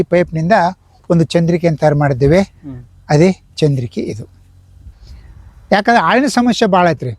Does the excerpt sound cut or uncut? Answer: cut